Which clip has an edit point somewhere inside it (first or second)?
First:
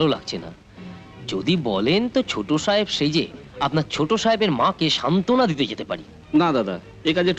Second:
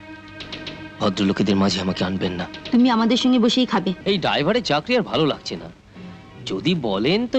second